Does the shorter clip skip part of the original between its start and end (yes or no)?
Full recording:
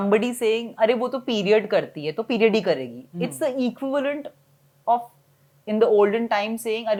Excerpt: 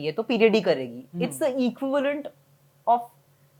no